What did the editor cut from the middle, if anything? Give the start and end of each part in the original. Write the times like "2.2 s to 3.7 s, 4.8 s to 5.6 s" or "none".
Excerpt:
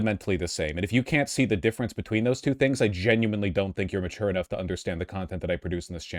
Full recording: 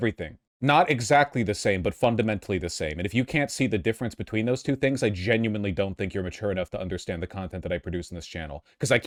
none

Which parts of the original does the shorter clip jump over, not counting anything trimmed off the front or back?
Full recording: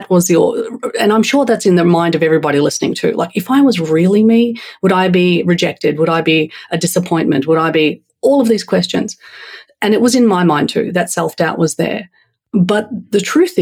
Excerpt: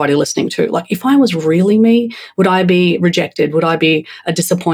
none

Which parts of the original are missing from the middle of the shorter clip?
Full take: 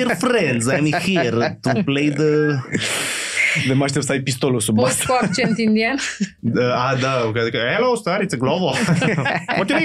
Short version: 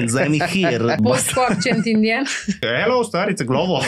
1.5 s to 4.7 s, 6.4 s to 7.6 s

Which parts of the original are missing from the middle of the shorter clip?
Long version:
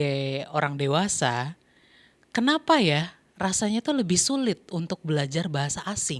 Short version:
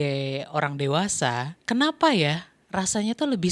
1.5 s to 2.2 s

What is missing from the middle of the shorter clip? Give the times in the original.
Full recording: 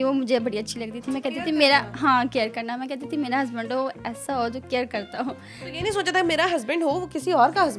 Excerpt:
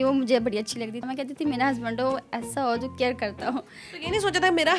1.0 s to 2.7 s

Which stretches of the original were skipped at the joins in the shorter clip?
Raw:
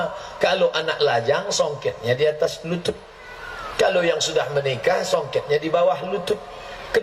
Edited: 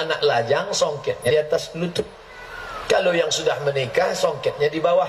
2.1 s to 2.2 s

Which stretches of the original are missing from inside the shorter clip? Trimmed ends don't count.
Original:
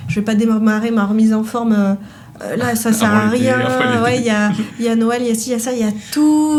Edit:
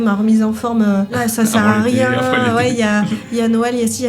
2.0 s to 2.6 s

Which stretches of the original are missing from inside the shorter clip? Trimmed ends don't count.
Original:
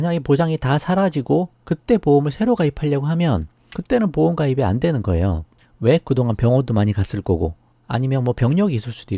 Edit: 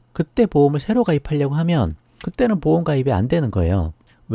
none

